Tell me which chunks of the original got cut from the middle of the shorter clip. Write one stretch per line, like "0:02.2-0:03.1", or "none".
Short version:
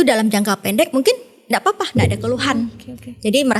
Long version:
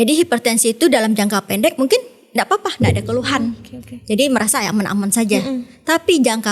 none